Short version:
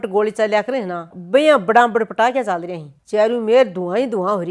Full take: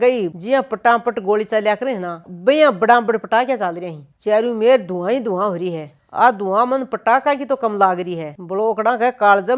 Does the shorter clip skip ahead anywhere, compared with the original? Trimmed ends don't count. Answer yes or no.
no